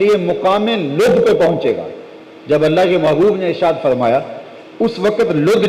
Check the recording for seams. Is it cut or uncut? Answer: uncut